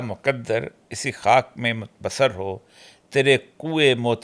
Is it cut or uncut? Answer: uncut